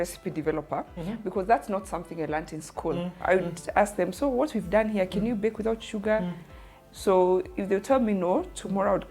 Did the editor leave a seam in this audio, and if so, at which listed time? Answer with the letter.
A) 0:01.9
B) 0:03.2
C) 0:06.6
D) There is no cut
B